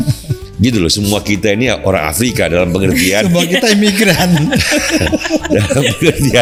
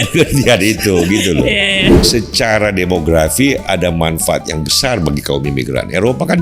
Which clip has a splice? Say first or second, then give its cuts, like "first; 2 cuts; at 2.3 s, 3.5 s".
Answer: second; 1 cut; at 1.9 s